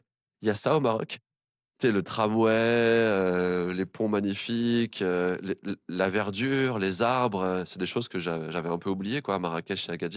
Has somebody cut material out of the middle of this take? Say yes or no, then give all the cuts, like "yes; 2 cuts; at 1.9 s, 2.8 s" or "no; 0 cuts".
no; 0 cuts